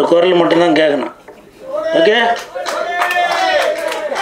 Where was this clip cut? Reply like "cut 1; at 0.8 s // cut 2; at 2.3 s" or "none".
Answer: none